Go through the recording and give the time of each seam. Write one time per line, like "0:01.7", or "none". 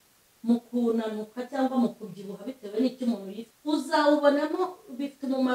0:03.4

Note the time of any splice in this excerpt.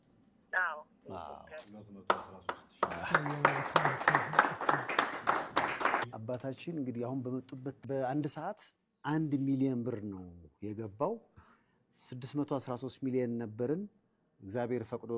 0:06.1
0:07.8

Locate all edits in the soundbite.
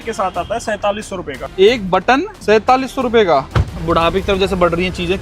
0:02.3
0:03.7

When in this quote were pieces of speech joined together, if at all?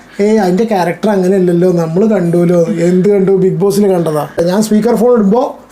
0:04.3

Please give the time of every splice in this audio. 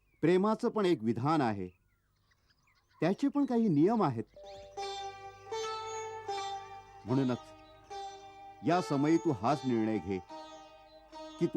0:04.6

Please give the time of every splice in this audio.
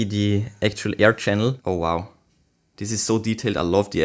0:01.6

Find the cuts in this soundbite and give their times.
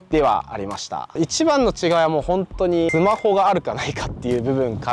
0:01.1
0:02.9

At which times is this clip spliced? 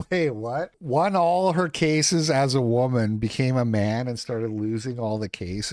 none

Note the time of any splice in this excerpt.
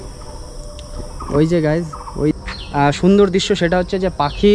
0:02.3

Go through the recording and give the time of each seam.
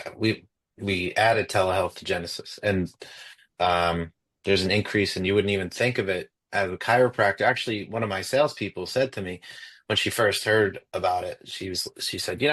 none

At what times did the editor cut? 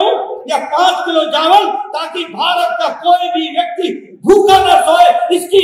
none

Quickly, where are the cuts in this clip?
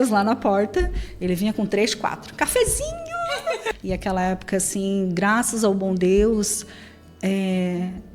0:03.7

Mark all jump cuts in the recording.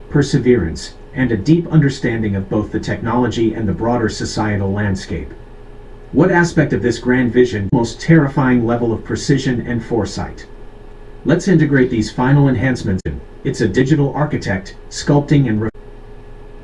0:07.7
0:13.1
0:15.7

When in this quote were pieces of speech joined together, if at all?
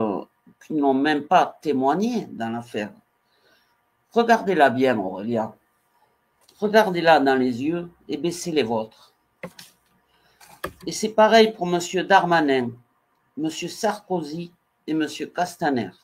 none

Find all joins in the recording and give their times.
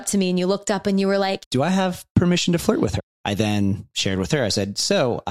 0:01.4
0:03.0

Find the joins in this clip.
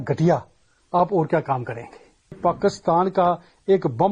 0:02.4

